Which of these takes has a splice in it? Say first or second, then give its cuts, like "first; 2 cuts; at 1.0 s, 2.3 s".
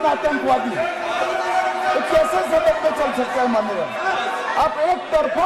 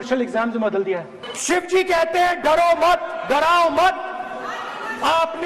second; 1 cut; at 1.2 s